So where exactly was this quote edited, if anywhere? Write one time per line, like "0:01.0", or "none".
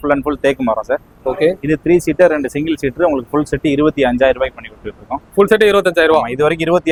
none